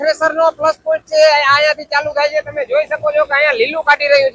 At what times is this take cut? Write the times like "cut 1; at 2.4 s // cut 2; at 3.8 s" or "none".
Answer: none